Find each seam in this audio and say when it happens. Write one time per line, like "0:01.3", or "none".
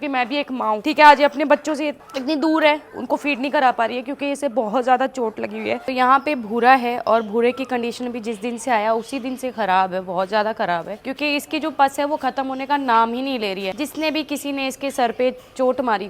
none